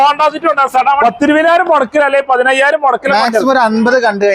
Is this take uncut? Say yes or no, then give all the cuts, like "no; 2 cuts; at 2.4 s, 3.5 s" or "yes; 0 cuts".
no; 1 cut; at 1.0 s